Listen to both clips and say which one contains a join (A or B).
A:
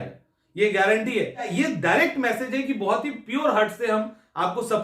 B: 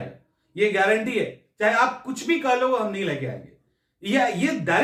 A